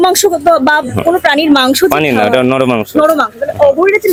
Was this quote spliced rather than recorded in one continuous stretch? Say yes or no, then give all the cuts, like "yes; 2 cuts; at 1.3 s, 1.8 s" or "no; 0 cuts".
no; 0 cuts